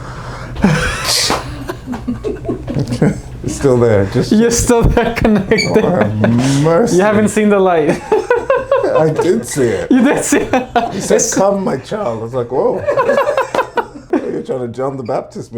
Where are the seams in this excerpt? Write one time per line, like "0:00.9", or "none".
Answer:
0:14.0

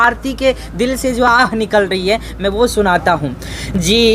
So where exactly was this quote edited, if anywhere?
none

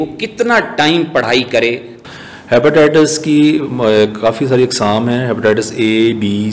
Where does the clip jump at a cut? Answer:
0:01.9

